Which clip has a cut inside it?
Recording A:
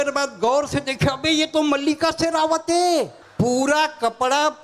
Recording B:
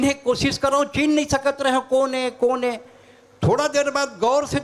A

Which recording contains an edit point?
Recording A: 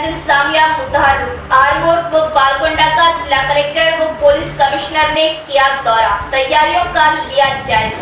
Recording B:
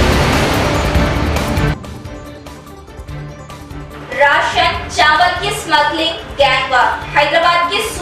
B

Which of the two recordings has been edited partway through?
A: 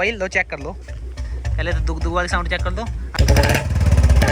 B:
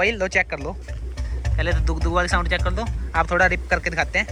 A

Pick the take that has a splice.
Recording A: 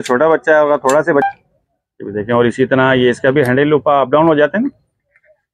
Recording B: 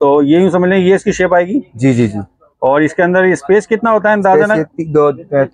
A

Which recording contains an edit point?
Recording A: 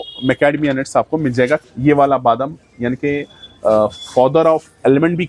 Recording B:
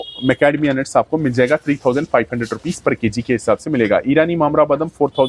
A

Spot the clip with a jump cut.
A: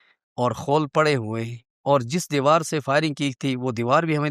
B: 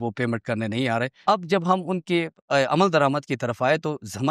B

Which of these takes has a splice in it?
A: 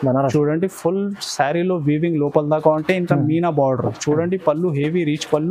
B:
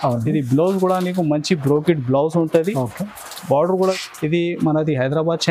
B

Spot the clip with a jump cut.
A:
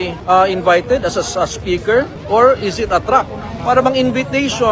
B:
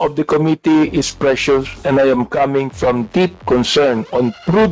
A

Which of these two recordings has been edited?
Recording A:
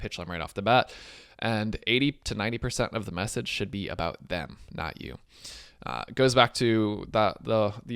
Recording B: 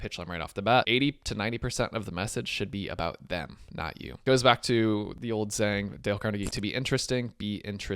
B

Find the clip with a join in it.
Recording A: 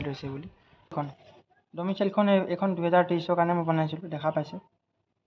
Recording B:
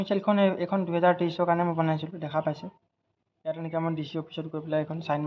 A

